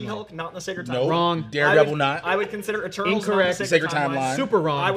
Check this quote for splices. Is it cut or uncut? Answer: uncut